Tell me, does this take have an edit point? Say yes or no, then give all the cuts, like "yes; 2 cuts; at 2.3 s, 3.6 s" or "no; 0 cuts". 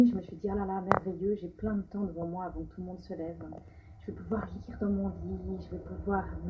yes; 1 cut; at 4.0 s